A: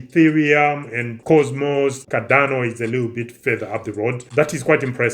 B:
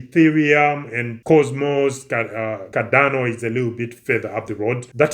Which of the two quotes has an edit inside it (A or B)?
A